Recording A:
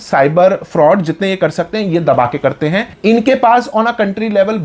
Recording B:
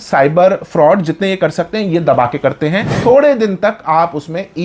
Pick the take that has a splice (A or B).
B